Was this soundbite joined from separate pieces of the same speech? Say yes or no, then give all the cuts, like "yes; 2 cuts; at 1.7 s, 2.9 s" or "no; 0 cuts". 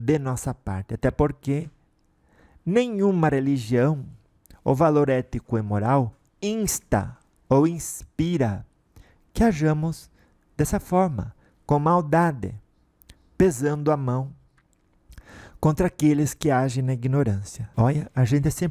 yes; 1 cut; at 17.6 s